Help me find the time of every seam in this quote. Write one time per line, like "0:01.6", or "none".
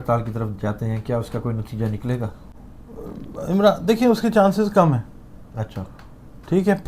none